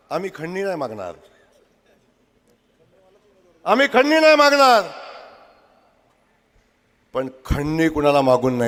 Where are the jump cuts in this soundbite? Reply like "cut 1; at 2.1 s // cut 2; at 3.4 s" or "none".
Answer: none